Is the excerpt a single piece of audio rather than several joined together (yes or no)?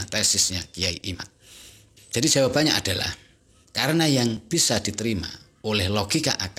yes